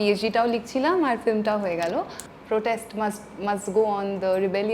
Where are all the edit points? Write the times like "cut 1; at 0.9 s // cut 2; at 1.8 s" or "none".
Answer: cut 1; at 2.2 s